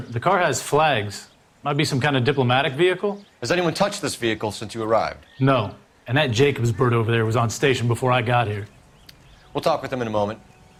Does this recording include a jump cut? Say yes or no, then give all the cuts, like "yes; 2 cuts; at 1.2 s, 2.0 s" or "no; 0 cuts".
no; 0 cuts